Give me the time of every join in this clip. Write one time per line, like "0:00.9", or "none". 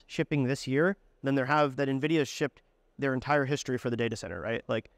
none